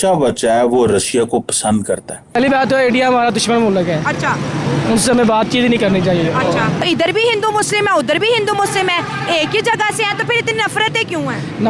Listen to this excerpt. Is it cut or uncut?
cut